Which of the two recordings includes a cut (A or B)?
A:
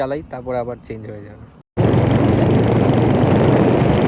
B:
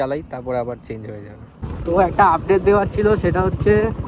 B